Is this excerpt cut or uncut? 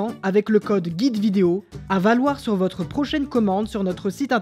cut